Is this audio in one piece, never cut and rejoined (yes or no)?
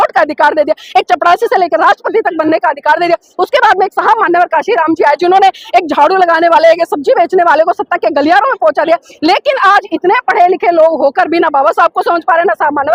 yes